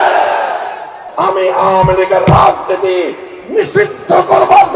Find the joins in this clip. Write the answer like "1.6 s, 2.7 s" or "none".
1.0 s